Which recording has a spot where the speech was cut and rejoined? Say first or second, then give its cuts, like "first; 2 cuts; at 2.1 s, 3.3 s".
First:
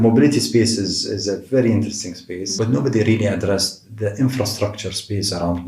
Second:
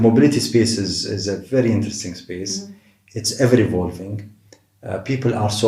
first; 1 cut; at 2.5 s